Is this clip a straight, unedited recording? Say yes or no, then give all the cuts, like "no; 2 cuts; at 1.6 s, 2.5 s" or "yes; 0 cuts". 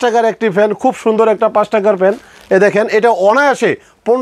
yes; 0 cuts